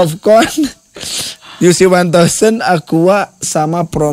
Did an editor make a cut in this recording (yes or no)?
no